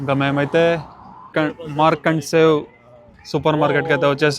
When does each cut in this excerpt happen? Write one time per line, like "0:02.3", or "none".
0:01.3